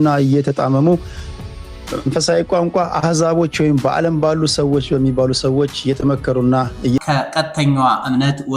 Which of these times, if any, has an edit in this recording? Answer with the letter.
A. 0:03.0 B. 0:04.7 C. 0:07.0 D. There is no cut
C